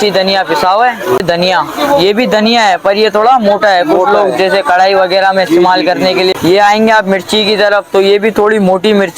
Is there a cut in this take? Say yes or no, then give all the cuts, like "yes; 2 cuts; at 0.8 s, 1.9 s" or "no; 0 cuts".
yes; 2 cuts; at 1.2 s, 6.3 s